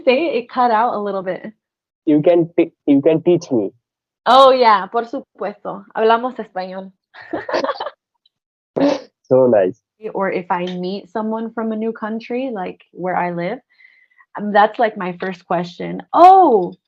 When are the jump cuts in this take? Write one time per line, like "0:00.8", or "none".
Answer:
0:10.1